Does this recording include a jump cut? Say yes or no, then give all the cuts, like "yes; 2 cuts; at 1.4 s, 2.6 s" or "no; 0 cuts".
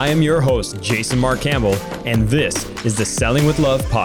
no; 0 cuts